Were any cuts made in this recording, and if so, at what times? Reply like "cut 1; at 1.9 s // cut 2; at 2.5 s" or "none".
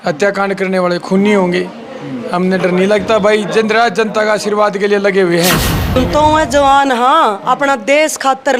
cut 1; at 6.0 s